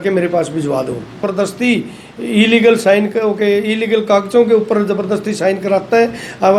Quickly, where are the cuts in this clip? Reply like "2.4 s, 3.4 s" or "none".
1.3 s